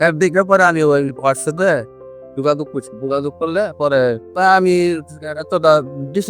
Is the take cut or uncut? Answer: uncut